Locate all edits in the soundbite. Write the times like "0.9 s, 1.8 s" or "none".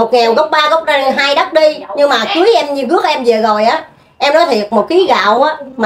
none